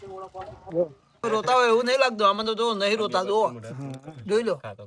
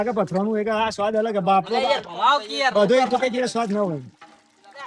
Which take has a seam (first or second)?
first